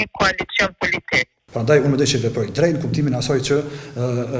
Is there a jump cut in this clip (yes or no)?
yes